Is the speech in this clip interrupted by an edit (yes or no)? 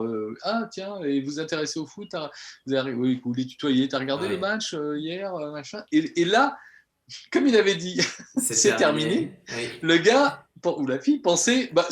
no